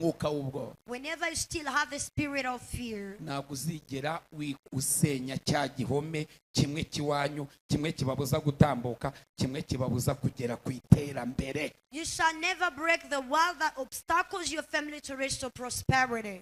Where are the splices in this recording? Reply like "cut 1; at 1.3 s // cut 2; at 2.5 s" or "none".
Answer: none

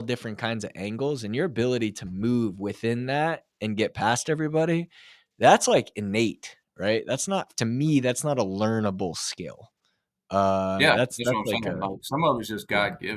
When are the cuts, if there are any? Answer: none

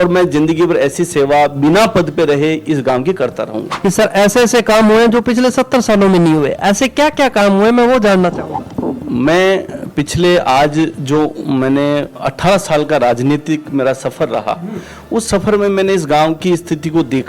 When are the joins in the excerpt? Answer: cut 1; at 3.6 s

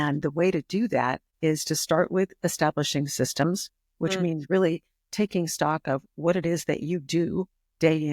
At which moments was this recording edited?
cut 1; at 1.2 s

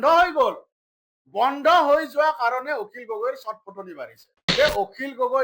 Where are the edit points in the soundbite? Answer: cut 1; at 4.4 s

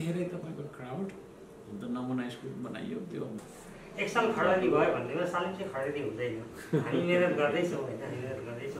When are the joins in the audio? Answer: cut 1; at 3.4 s

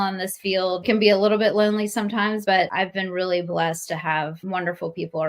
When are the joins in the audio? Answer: cut 1; at 0.8 s // cut 2; at 2.5 s // cut 3; at 4.4 s

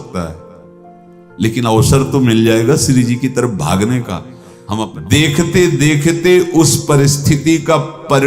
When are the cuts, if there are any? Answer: cut 1; at 4.9 s

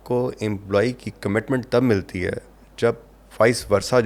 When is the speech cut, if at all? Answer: none

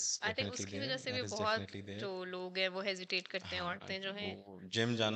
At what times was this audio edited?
none

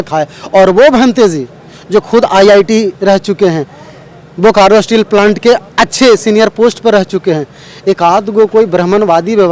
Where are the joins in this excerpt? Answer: none

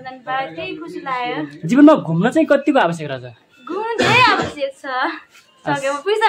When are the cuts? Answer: none

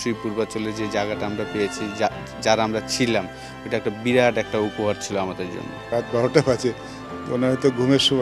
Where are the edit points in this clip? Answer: cut 1; at 5.8 s

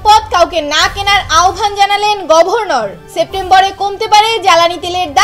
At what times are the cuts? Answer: cut 1; at 3.0 s

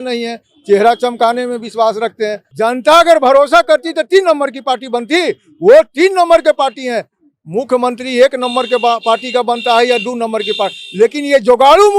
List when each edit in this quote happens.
cut 1; at 2.4 s

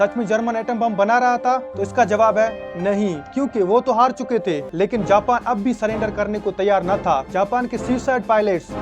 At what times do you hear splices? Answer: cut 1; at 4.6 s

